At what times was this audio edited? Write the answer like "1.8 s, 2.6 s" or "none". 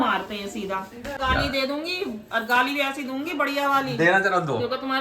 1.2 s